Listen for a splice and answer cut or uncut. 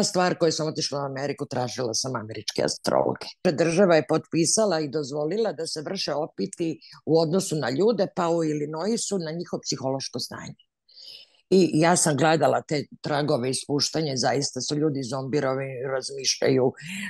cut